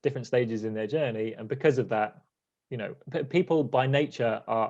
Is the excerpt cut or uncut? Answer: uncut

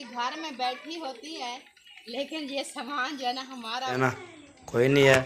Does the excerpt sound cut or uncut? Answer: cut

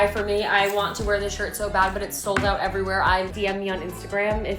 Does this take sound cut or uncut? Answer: cut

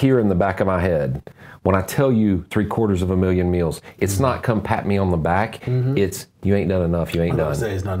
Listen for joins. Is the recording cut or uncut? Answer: uncut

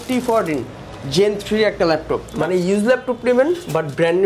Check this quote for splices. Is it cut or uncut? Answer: cut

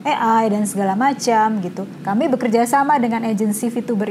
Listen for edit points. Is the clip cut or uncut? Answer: cut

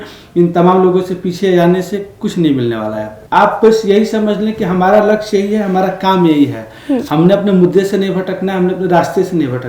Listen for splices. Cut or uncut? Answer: cut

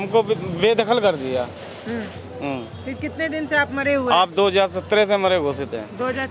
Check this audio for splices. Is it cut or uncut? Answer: uncut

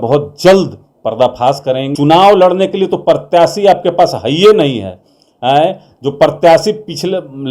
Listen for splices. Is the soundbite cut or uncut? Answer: cut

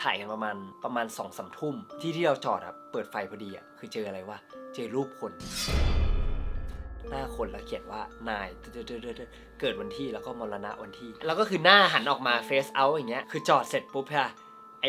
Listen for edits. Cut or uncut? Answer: uncut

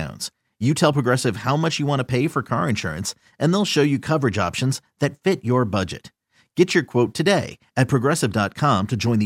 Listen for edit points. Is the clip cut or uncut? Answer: uncut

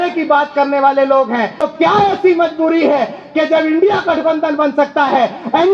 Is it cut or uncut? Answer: cut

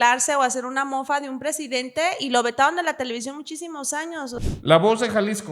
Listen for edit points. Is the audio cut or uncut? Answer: cut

